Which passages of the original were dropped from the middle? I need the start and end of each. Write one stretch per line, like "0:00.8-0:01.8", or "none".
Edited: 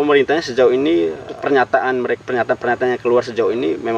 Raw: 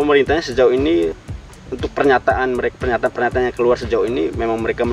0:01.3-0:01.8